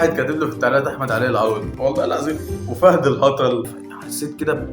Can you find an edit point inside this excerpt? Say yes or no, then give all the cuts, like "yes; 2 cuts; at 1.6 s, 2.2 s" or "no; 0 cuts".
yes; 2 cuts; at 1.7 s, 3.7 s